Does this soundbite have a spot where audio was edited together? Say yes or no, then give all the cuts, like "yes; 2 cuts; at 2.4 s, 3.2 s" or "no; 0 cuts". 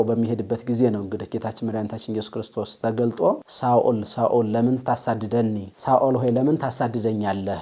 no; 0 cuts